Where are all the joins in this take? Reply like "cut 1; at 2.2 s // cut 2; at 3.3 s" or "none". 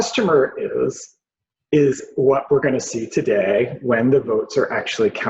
none

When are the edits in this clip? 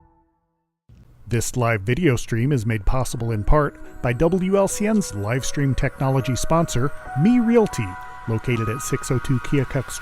cut 1; at 1.1 s

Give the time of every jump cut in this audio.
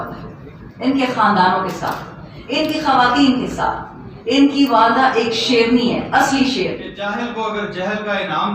cut 1; at 6.9 s

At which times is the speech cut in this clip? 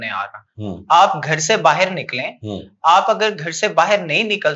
none

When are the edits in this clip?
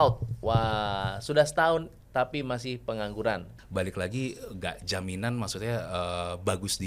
cut 1; at 3.5 s

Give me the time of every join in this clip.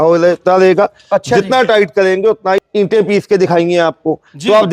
cut 1; at 2.6 s

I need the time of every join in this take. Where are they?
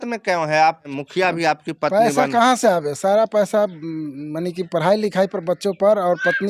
cut 1; at 0.9 s

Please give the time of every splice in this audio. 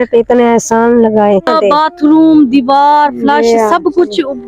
cut 1; at 1.5 s

